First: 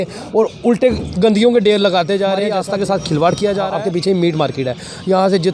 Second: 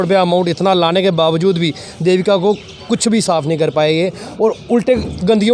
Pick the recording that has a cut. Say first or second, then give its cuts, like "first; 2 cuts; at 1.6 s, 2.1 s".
first; 2 cuts; at 2.4 s, 3.7 s